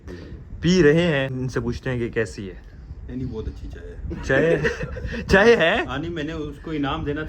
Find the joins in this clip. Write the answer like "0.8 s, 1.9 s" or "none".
1.3 s